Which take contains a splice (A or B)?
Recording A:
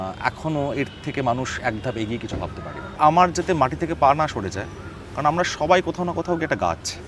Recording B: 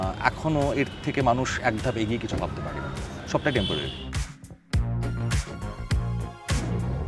A